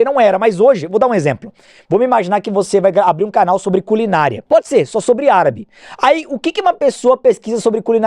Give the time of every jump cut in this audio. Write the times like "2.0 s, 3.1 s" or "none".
4.4 s